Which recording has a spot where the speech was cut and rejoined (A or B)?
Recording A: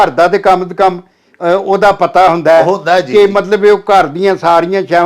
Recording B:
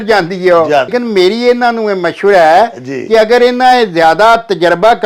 B